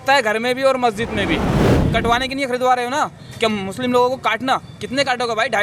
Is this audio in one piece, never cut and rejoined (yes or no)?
no